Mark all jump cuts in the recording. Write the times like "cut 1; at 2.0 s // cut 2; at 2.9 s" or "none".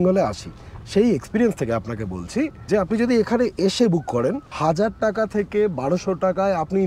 cut 1; at 2.6 s // cut 2; at 4.5 s